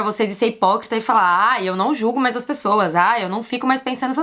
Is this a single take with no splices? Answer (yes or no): yes